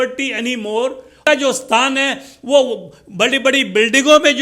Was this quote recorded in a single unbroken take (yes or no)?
no